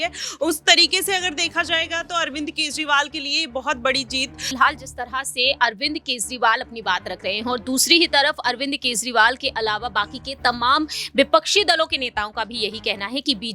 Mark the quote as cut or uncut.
cut